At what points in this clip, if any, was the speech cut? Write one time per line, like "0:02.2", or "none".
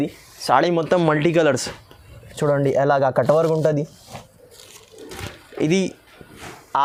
none